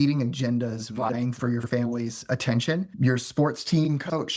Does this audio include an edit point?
yes; 1 cut; at 2.9 s

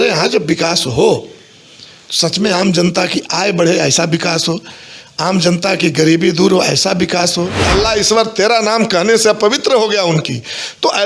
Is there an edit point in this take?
yes; 1 cut; at 7.6 s

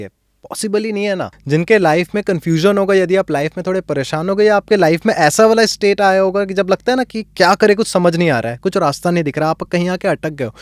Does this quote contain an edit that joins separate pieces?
yes; 1 cut; at 1.4 s

